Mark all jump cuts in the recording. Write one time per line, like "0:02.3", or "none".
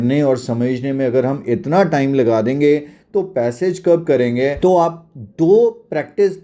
0:04.5